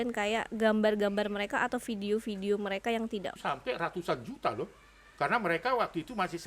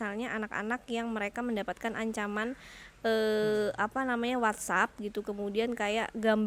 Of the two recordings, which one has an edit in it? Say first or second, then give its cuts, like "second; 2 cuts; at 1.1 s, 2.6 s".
first; 1 cut; at 3.3 s